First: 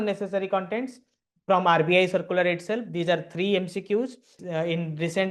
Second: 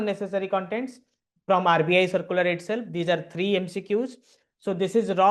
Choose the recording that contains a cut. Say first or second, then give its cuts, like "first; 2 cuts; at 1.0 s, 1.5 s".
first; 1 cut; at 4.3 s